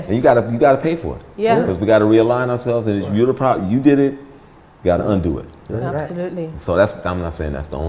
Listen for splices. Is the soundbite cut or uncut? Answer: uncut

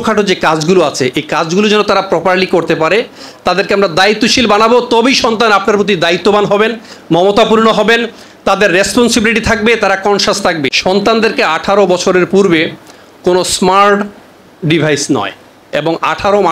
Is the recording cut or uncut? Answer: cut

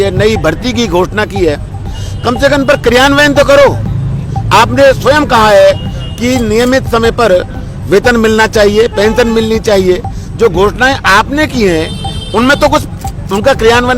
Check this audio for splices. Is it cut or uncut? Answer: uncut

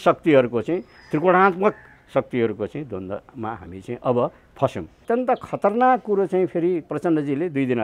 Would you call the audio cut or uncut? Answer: cut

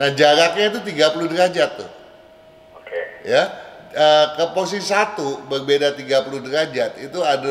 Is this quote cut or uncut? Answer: uncut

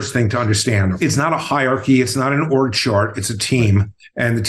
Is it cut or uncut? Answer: cut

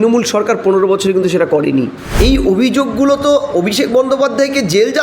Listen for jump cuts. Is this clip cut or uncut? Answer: cut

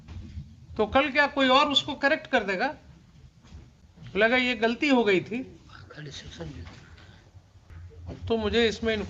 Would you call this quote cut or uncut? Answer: cut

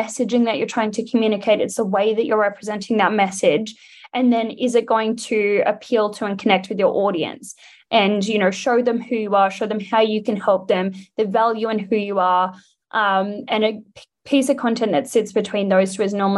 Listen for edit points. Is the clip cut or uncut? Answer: uncut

